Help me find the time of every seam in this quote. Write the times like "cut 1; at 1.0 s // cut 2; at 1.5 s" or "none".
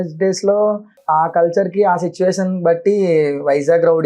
cut 1; at 1.0 s